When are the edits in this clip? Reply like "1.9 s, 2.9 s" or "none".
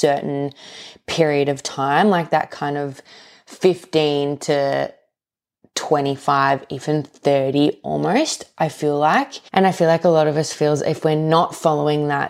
9.4 s